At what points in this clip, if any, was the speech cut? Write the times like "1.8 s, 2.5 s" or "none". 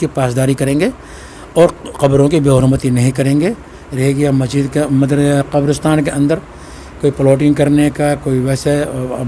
none